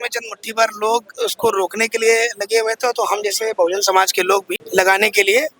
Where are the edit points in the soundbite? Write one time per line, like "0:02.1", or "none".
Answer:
0:04.6